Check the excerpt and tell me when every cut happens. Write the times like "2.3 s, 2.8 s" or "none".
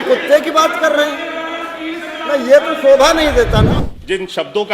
3.8 s